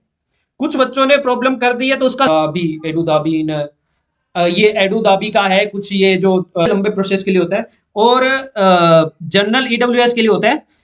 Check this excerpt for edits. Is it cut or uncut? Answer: cut